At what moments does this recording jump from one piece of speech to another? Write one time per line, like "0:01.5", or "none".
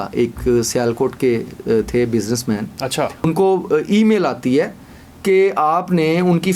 0:03.3